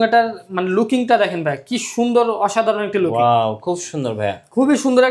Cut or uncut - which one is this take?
uncut